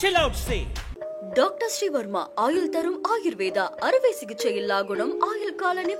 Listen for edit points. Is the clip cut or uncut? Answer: uncut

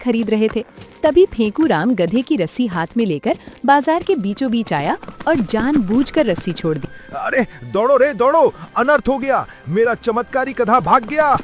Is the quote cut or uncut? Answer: uncut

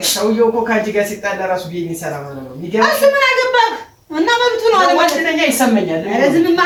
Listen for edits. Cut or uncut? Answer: uncut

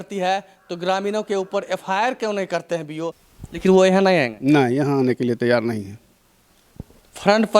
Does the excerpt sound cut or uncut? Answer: cut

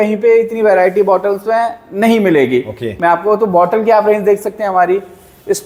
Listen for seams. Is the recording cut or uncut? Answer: uncut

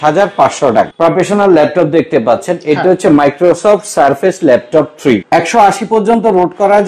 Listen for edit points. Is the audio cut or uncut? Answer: cut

